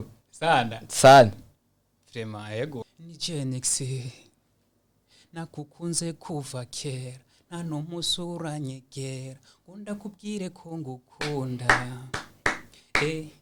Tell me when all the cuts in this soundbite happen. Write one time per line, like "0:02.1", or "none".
0:02.9